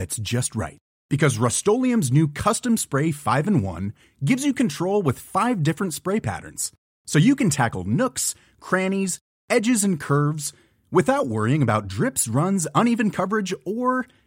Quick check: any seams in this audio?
no; 0 cuts

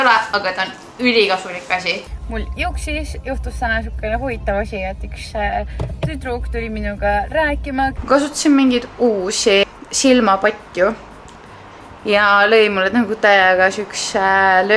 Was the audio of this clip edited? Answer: yes; 3 cuts; at 2.0 s, 8.0 s, 9.6 s

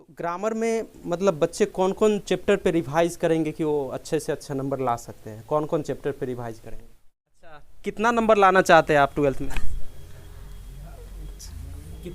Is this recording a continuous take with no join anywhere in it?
no; 1 cut; at 7.7 s

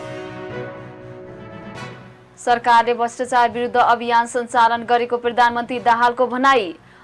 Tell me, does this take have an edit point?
yes; 2 cuts; at 1.0 s, 2.0 s

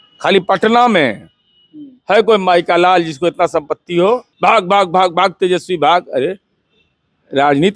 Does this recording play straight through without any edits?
no; 1 cut; at 4.3 s

